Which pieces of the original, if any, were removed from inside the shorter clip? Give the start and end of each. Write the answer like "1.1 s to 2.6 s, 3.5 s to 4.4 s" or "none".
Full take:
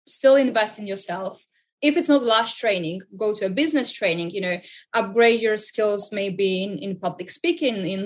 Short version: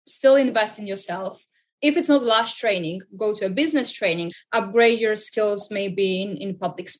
4.3 s to 4.7 s